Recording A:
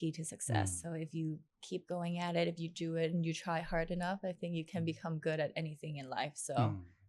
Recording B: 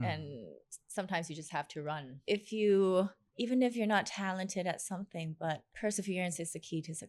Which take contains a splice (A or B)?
B